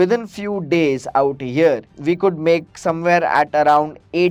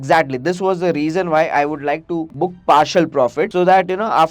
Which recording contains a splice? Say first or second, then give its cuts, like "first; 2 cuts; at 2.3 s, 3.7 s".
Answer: second; 2 cuts; at 2.3 s, 3.5 s